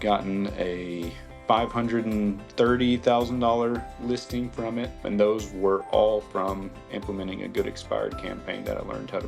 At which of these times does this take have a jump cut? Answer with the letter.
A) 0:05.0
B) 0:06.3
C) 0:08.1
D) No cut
A